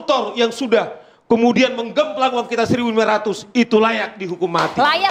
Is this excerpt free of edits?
yes; 0 cuts

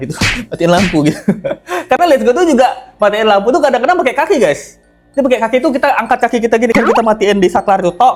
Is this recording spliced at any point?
no; 0 cuts

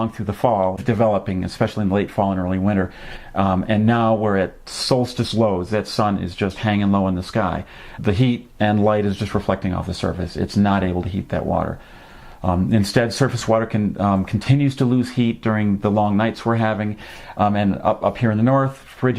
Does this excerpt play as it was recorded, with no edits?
no; 1 cut; at 15.6 s

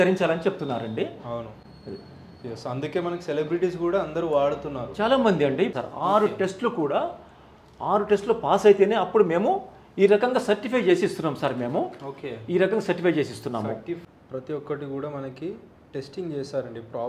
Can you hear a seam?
yes; 2 cuts; at 5.7 s, 14.0 s

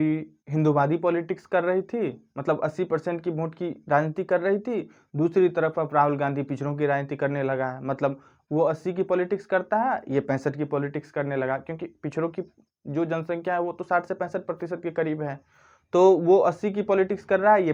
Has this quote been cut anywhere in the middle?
no; 0 cuts

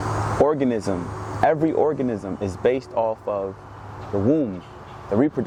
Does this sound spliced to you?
no; 0 cuts

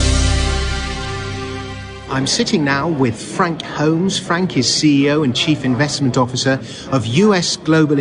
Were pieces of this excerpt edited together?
yes; 1 cut; at 3.4 s

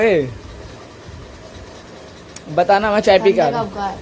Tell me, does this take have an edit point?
no; 0 cuts

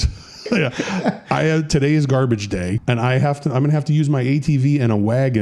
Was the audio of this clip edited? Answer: yes; 1 cut; at 2.8 s

